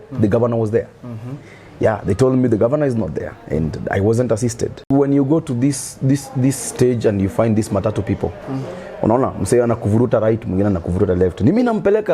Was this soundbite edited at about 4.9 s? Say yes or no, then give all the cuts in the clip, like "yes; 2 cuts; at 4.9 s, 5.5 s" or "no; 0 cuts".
yes; 1 cut; at 4.9 s